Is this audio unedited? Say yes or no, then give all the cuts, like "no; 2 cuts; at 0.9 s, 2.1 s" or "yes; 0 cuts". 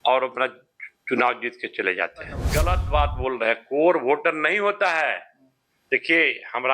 no; 1 cut; at 2.4 s